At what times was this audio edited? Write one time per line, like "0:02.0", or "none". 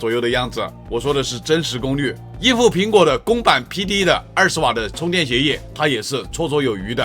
0:02.3
0:04.9
0:05.7